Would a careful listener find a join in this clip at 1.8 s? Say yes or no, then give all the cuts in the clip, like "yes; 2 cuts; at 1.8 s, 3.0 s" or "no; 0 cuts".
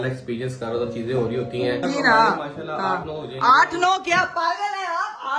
yes; 1 cut; at 1.8 s